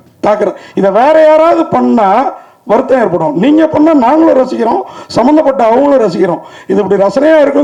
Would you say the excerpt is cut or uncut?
uncut